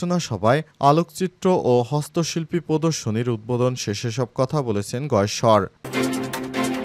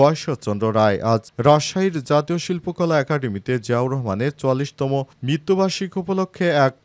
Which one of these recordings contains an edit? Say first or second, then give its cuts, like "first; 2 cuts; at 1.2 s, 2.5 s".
first; 1 cut; at 5.8 s